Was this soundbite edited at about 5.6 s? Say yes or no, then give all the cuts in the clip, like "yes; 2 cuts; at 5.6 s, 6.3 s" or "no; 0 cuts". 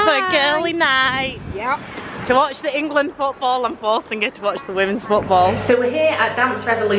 yes; 1 cut; at 5.6 s